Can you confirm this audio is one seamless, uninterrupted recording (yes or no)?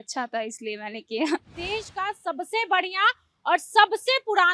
no